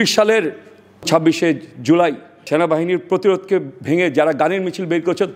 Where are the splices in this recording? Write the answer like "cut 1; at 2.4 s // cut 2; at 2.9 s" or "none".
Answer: cut 1; at 1.1 s // cut 2; at 2.5 s